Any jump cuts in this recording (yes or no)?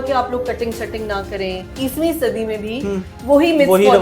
yes